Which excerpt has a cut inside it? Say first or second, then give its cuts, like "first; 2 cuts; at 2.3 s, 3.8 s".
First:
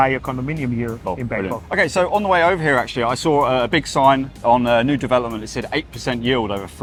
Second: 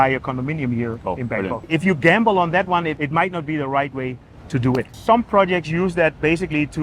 second; 2 cuts; at 1.7 s, 4.9 s